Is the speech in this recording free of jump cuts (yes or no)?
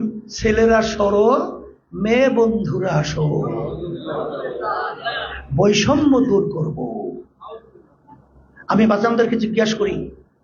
yes